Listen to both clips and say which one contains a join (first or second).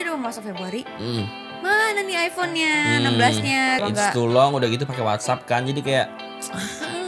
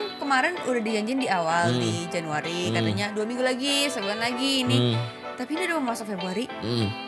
first